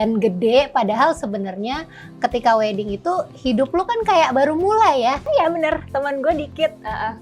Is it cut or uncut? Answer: cut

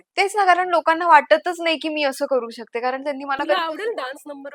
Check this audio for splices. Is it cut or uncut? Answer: uncut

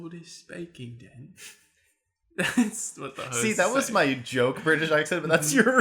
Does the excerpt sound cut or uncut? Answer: uncut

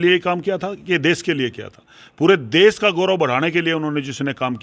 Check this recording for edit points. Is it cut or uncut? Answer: uncut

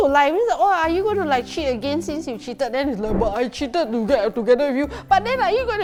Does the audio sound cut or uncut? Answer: uncut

